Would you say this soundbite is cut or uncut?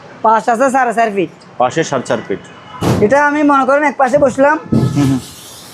cut